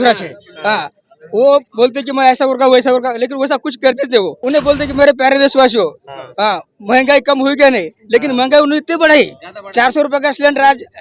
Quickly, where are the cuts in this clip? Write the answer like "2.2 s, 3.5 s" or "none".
4.4 s